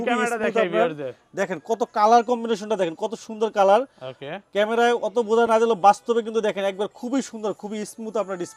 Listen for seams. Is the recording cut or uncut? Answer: uncut